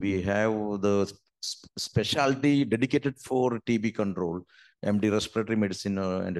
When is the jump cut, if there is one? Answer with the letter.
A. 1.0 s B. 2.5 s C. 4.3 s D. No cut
D